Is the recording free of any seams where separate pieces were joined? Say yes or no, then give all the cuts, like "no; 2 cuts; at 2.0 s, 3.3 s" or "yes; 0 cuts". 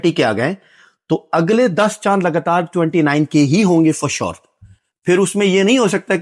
yes; 0 cuts